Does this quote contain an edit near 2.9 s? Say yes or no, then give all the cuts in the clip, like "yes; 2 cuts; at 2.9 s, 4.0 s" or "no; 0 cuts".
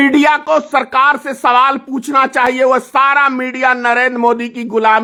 no; 0 cuts